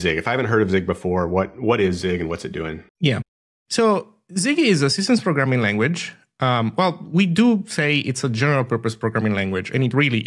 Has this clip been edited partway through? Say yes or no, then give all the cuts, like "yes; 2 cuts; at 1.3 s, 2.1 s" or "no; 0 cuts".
no; 0 cuts